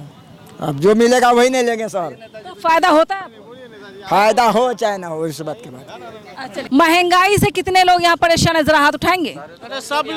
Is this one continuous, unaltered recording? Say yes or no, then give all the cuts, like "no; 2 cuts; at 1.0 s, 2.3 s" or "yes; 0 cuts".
yes; 0 cuts